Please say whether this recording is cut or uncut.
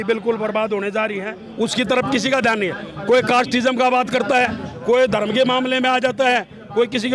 cut